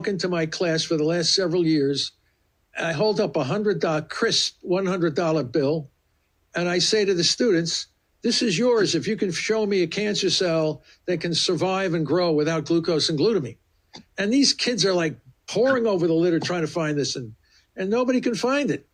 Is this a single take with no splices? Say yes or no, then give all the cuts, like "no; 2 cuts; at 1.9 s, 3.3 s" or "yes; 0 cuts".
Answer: yes; 0 cuts